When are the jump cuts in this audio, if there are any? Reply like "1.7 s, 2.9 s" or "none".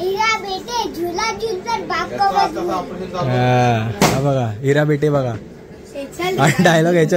none